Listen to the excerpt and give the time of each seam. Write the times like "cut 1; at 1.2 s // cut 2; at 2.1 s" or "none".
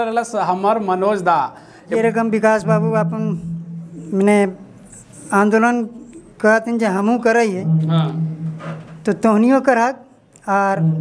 cut 1; at 1.9 s